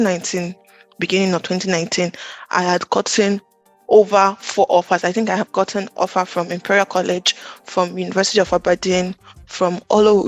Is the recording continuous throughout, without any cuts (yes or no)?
yes